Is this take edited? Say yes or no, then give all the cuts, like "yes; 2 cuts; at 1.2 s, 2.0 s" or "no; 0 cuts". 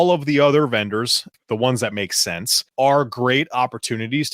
yes; 2 cuts; at 1.3 s, 2.6 s